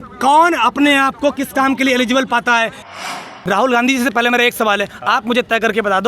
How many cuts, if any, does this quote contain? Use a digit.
1